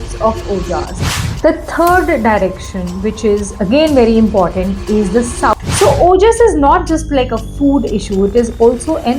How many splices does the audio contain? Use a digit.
2